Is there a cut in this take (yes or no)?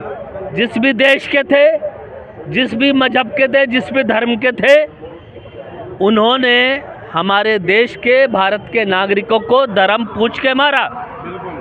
no